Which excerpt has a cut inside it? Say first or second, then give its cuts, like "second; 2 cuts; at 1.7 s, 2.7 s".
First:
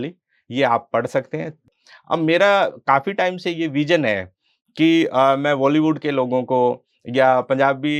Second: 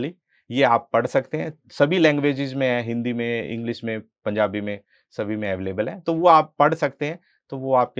first; 1 cut; at 1.6 s